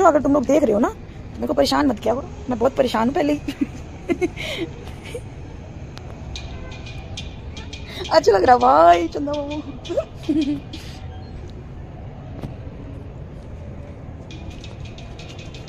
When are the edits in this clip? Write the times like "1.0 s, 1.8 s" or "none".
none